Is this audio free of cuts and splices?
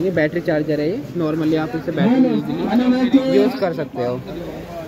yes; 0 cuts

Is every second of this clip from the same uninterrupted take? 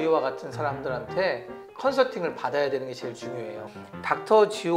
no; 1 cut; at 3.7 s

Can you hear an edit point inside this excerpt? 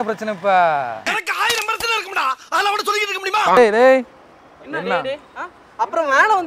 yes; 1 cut; at 3.6 s

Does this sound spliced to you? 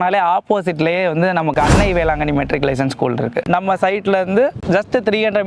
no; 0 cuts

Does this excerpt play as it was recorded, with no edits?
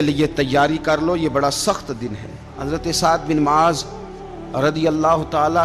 no; 1 cut; at 2.5 s

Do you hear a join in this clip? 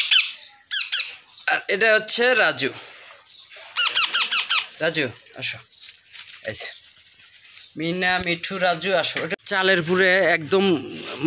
yes; 1 cut; at 9.3 s

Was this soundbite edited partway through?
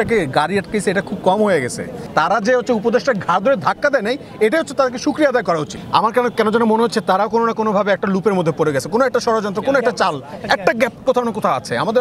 yes; 2 cuts; at 1.9 s, 5.8 s

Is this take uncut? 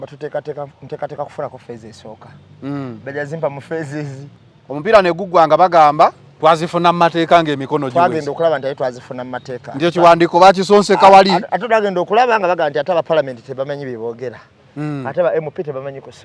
no; 1 cut; at 4.3 s

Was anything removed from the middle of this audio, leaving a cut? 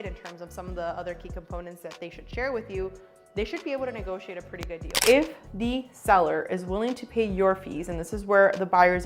yes; 1 cut; at 4.8 s

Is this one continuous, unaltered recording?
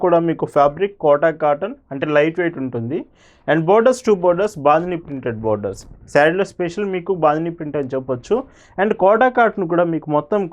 yes; 0 cuts

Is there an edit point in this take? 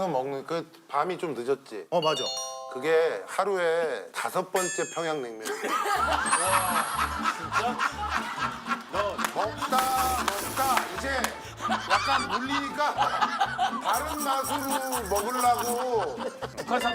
no; 0 cuts

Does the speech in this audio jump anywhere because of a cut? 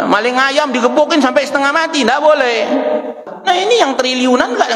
yes; 1 cut; at 3.3 s

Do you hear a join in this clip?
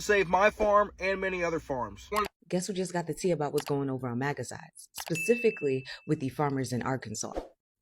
yes; 1 cut; at 2.3 s

